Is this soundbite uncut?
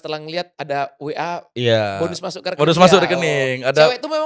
yes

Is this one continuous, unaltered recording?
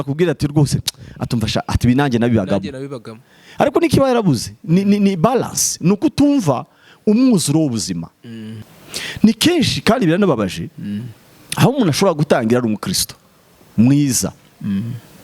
no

